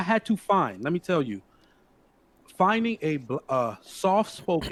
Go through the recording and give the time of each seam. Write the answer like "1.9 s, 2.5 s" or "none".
none